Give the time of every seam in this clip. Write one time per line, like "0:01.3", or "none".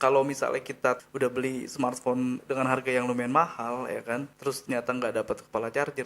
0:01.0
0:02.4
0:04.3